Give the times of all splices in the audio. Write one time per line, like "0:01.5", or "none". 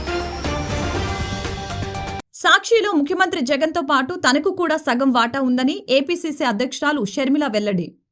none